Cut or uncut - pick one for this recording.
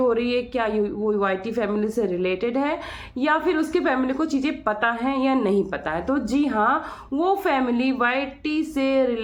uncut